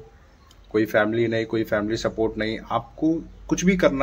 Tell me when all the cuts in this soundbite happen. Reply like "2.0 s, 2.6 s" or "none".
none